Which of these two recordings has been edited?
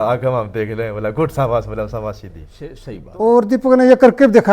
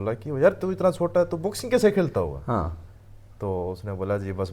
first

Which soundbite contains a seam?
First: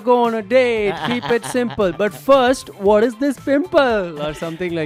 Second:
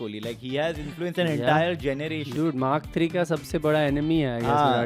second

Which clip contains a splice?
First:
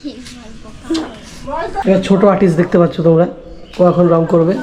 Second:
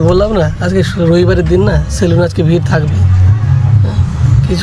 first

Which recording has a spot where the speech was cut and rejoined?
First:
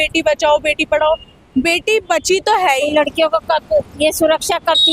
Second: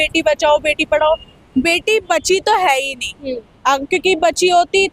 first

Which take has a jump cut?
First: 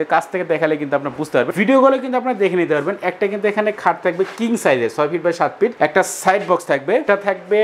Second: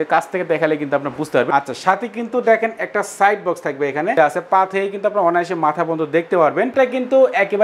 second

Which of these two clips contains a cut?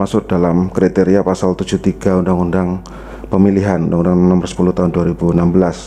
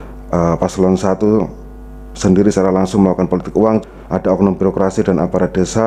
second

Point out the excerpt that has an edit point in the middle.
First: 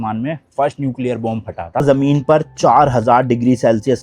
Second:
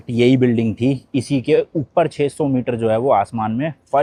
first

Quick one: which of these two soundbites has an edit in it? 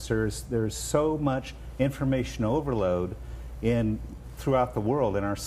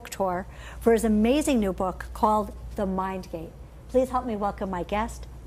second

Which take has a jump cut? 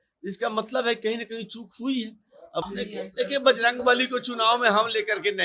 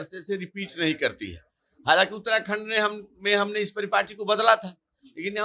first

